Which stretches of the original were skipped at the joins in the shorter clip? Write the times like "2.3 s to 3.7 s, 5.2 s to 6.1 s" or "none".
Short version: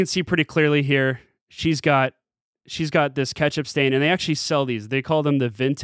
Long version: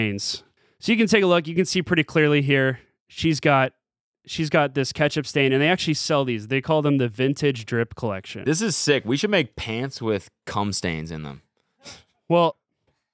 none